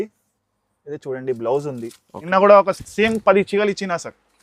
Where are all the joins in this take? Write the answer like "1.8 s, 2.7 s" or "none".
2.3 s